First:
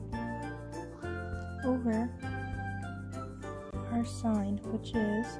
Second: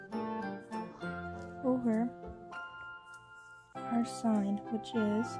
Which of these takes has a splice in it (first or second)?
first